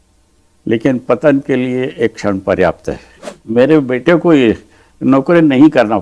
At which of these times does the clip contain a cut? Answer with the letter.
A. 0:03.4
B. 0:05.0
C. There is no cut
A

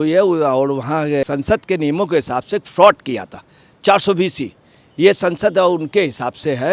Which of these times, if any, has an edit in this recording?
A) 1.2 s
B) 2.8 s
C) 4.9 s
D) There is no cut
A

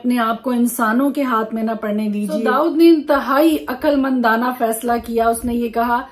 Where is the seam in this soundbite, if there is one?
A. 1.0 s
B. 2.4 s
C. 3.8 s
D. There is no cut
B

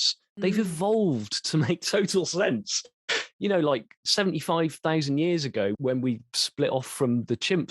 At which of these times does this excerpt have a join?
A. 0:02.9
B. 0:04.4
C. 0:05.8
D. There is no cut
C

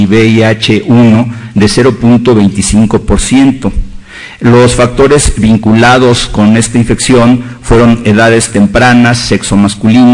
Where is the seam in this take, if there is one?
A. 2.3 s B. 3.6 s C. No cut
C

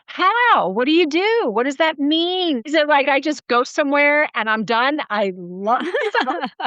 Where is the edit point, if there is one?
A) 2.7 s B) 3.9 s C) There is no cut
A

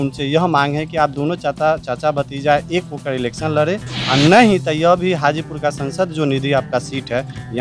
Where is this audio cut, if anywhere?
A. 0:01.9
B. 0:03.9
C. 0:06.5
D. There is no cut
B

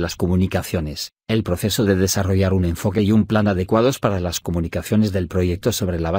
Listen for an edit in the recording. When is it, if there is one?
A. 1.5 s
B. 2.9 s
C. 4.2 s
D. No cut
A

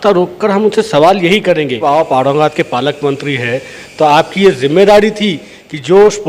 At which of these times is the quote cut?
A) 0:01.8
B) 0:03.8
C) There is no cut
A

